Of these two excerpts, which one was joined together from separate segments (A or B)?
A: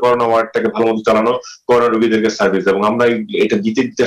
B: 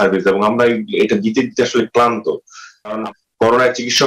B